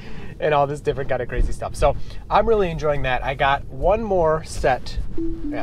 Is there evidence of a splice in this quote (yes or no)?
no